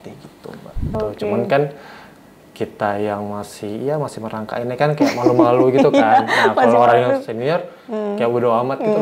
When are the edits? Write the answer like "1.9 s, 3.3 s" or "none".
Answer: 0.9 s